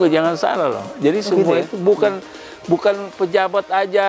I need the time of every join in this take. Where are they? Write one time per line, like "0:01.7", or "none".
none